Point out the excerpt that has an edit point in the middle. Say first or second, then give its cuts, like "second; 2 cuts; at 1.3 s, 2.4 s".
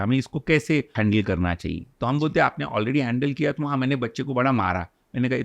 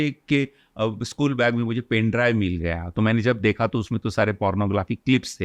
first; 1 cut; at 0.9 s